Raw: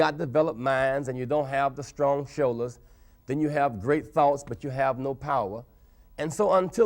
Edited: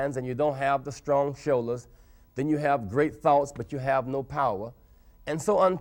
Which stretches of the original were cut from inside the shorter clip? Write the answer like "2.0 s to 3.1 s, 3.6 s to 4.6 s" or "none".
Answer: none